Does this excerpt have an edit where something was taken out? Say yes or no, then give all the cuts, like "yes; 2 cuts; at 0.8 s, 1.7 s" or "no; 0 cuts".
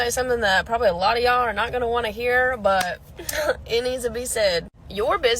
yes; 1 cut; at 2.6 s